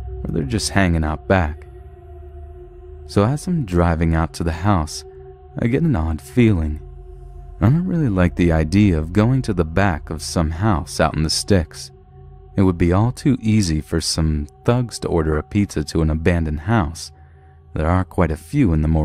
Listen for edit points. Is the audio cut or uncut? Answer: cut